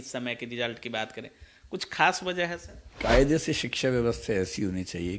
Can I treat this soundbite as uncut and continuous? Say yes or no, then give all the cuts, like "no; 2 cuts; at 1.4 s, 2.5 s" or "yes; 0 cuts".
no; 1 cut; at 2.8 s